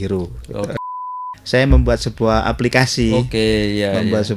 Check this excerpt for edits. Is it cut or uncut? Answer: cut